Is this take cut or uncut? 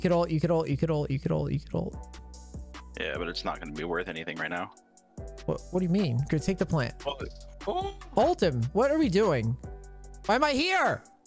uncut